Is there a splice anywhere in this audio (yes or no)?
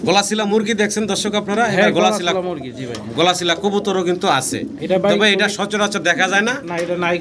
no